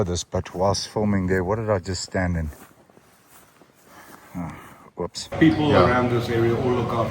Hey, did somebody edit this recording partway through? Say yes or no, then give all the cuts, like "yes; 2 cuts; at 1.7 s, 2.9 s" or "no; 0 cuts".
yes; 1 cut; at 5.3 s